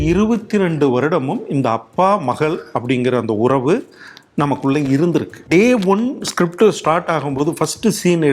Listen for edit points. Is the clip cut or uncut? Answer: cut